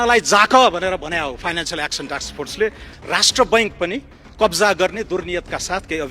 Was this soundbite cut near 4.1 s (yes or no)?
no